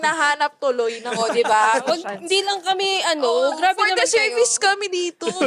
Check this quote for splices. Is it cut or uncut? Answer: uncut